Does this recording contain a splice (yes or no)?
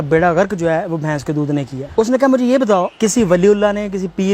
yes